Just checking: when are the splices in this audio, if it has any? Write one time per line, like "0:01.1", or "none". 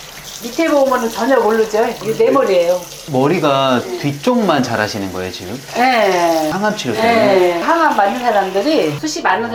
none